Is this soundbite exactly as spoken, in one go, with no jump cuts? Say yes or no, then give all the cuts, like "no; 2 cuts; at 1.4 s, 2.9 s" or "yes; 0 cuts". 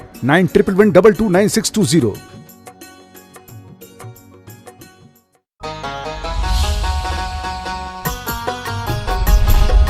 no; 1 cut; at 5.6 s